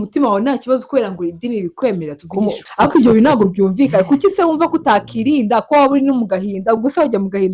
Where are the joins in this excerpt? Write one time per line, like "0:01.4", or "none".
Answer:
0:02.7